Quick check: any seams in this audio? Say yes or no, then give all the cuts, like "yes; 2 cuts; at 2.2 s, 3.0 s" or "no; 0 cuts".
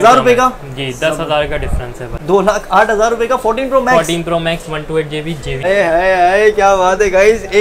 yes; 2 cuts; at 2.1 s, 5.6 s